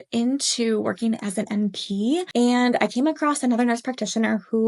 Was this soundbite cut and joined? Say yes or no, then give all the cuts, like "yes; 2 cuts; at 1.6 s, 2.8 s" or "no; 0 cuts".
yes; 1 cut; at 2.3 s